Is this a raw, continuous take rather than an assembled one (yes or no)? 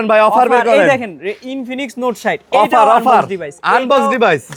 yes